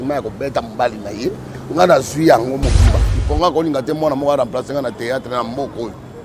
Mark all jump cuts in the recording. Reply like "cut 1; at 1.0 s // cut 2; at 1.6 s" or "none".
cut 1; at 3.1 s